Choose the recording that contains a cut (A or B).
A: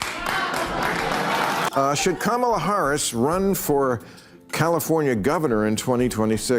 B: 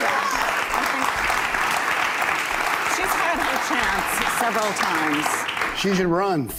A